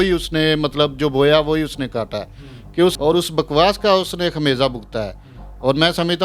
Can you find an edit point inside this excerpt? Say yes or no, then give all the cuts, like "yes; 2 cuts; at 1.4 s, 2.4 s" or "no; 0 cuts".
yes; 1 cut; at 2.9 s